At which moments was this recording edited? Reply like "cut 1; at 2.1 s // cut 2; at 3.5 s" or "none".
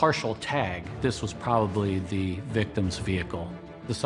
cut 1; at 0.9 s